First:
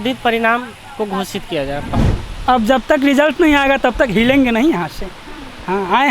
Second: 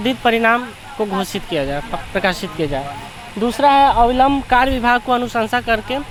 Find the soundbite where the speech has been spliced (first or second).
first